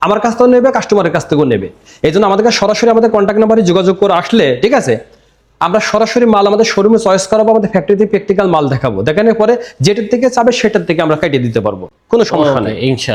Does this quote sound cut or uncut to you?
uncut